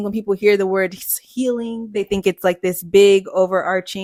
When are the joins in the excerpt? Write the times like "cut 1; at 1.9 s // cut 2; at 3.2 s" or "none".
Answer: none

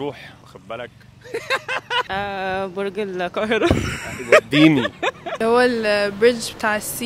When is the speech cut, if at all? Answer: cut 1; at 2.1 s // cut 2; at 5.2 s

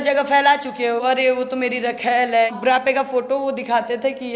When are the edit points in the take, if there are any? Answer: cut 1; at 1.0 s // cut 2; at 2.6 s

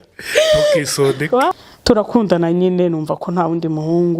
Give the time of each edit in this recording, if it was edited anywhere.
cut 1; at 1.5 s

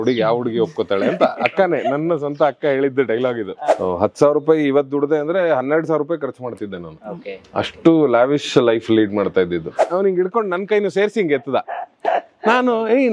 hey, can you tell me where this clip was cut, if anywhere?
cut 1; at 3.6 s // cut 2; at 9.9 s

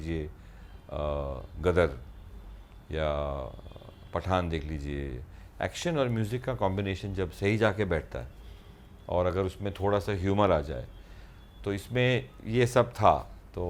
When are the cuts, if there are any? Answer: none

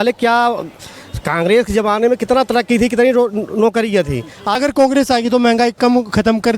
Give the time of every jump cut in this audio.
cut 1; at 4.6 s

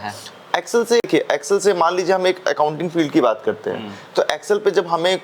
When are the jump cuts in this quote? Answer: cut 1; at 1.0 s

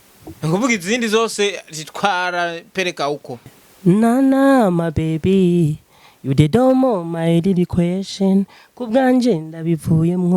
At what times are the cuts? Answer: cut 1; at 3.5 s

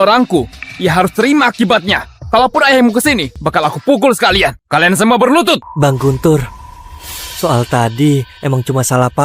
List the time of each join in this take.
cut 1; at 3.3 s // cut 2; at 4.6 s // cut 3; at 5.7 s

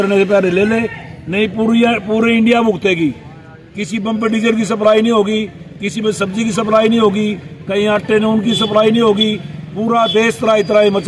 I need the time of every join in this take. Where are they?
none

